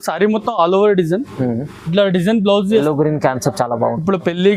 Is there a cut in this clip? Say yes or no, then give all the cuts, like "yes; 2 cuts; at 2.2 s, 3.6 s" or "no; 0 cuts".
yes; 1 cut; at 2.8 s